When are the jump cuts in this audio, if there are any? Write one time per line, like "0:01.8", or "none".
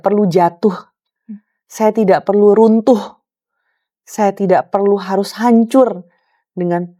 none